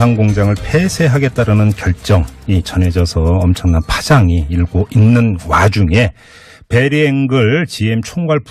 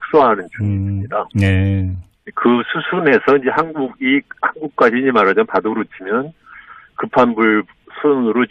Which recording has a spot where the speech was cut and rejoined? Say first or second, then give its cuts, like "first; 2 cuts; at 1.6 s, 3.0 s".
second; 1 cut; at 3.5 s